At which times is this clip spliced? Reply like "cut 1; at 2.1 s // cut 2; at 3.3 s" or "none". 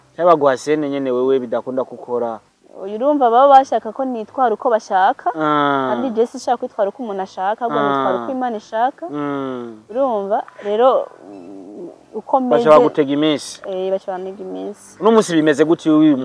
none